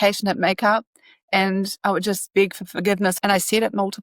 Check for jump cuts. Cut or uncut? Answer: cut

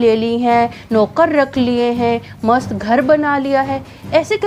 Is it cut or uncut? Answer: uncut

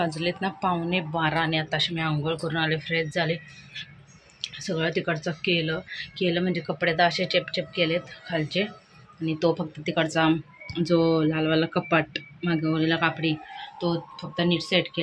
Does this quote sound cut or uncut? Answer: uncut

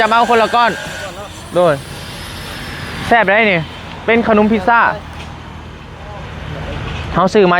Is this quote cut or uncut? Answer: uncut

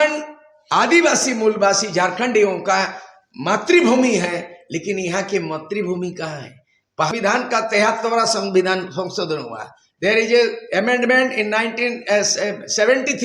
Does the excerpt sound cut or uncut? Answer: cut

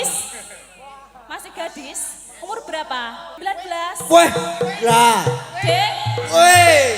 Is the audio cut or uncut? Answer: cut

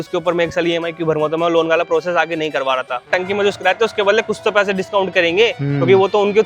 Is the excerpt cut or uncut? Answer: cut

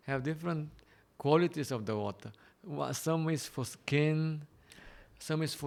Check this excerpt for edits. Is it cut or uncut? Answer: uncut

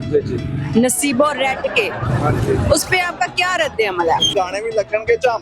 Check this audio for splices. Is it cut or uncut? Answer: cut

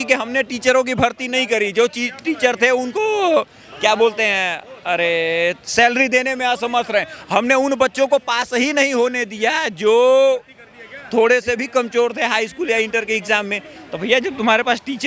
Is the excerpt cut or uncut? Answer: uncut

